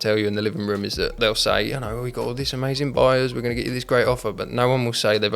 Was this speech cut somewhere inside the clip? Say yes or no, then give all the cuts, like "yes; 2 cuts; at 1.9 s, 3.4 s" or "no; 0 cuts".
yes; 1 cut; at 1.2 s